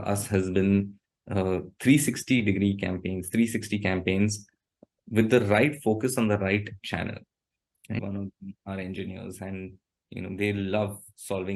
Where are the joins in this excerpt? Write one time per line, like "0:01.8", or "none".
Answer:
0:08.0